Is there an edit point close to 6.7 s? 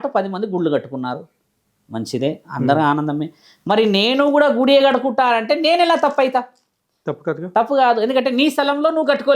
no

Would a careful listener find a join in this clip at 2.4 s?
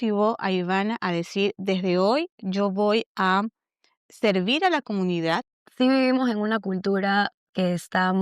no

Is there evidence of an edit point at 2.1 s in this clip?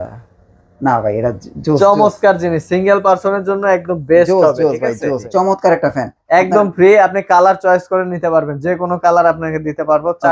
no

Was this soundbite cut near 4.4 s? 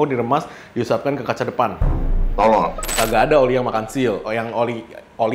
no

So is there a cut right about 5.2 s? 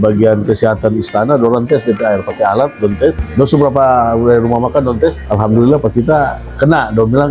yes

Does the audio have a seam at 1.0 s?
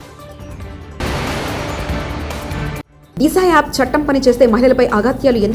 yes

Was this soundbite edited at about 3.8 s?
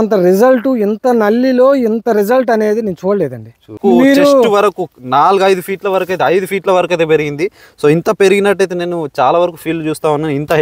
yes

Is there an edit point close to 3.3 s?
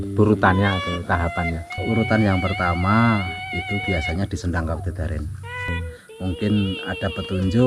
no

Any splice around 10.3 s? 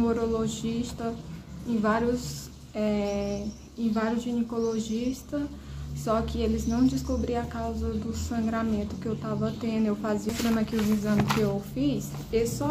yes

